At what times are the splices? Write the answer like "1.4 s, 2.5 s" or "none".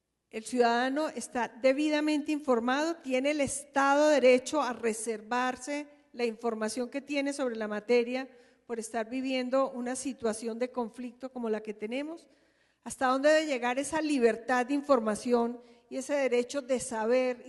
15.7 s